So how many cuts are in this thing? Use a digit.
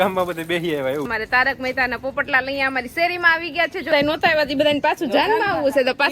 2